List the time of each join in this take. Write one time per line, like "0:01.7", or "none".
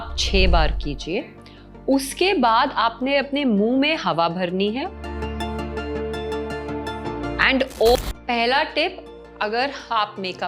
0:08.0